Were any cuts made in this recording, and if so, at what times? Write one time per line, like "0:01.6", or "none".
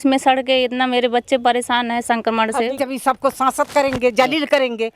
0:02.8